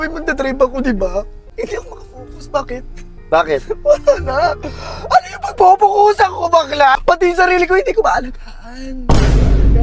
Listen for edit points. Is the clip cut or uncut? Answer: cut